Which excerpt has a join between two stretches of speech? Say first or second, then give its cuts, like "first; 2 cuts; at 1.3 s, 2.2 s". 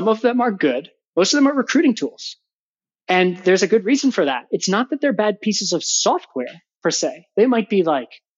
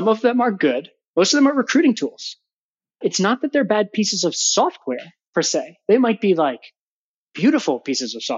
second; 1 cut; at 2.9 s